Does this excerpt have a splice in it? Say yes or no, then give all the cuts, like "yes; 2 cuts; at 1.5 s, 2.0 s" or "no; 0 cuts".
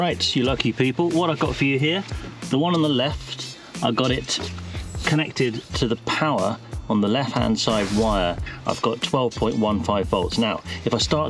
no; 0 cuts